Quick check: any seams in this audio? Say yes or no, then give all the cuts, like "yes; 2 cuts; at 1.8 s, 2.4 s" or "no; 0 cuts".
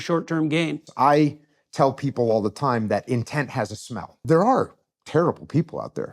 yes; 2 cuts; at 0.8 s, 4.2 s